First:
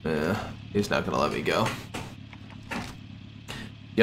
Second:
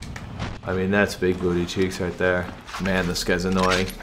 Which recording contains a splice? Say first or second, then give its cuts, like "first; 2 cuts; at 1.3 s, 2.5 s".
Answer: second; 1 cut; at 2.6 s